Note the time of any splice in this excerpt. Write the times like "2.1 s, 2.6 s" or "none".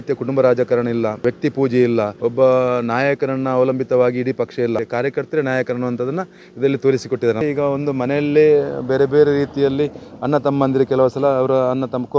1.2 s, 2.1 s, 4.8 s, 7.4 s